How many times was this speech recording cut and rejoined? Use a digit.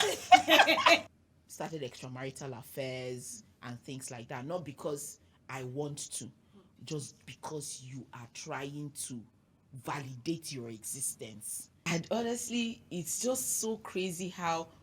2